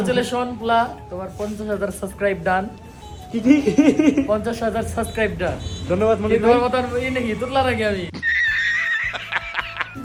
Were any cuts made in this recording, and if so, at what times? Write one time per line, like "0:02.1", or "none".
none